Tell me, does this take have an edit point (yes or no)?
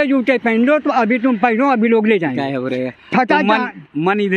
no